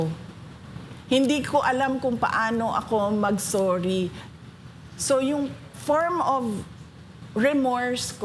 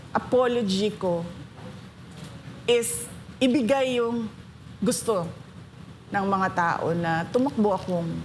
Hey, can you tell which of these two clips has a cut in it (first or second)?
first